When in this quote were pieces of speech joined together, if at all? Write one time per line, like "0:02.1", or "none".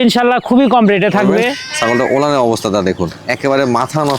0:01.7